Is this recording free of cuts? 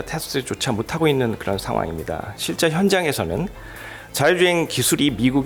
yes; 0 cuts

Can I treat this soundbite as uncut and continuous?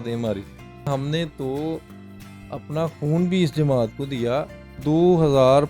no; 2 cuts; at 0.9 s, 4.7 s

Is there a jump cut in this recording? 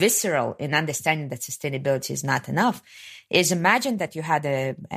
no; 0 cuts

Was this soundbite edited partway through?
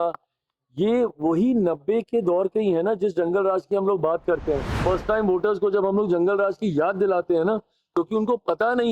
yes; 1 cut; at 4.7 s

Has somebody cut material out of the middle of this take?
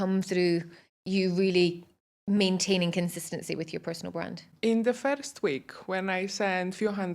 yes; 1 cut; at 4.5 s

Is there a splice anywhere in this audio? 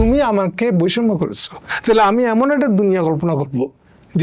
no; 0 cuts

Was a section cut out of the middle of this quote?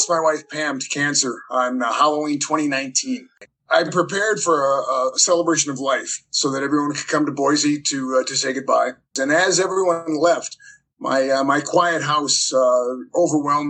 yes; 2 cuts; at 3.8 s, 9.1 s

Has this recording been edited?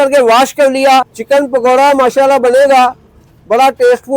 yes; 1 cut; at 1.1 s

